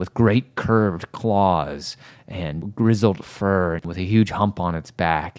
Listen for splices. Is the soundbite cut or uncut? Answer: cut